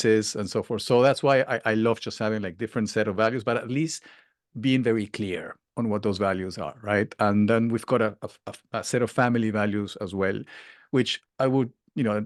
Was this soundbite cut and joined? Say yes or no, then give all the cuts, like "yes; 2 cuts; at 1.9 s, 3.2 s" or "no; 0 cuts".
no; 0 cuts